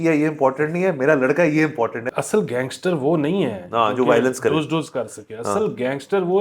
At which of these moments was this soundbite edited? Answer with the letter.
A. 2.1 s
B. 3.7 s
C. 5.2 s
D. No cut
A